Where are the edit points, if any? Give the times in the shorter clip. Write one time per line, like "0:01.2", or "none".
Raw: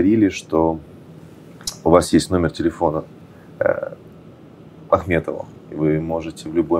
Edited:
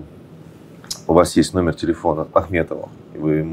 0:02.3